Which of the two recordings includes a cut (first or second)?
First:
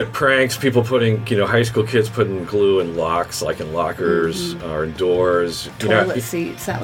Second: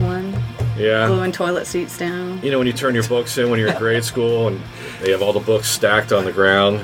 first